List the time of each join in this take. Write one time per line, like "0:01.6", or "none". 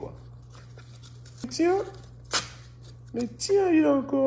0:01.5